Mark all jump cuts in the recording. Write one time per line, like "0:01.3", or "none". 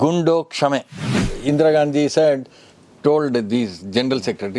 0:01.3